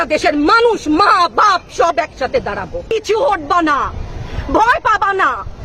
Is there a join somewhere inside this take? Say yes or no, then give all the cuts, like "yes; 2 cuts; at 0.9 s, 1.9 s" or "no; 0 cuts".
yes; 1 cut; at 2.9 s